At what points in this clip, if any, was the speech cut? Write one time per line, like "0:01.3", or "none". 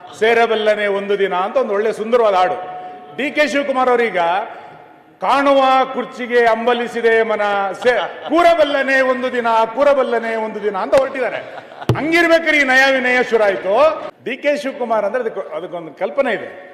0:14.1